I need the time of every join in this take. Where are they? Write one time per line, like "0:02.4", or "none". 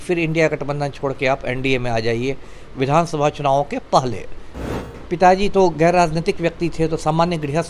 0:04.5